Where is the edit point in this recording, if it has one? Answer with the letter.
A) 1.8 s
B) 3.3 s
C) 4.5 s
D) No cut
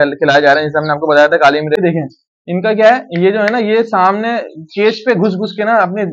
A